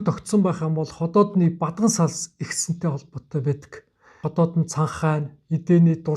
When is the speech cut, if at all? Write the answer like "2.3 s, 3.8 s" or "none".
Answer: 4.2 s